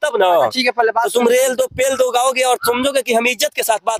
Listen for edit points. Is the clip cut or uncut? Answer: uncut